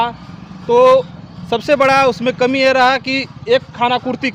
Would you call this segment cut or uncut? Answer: uncut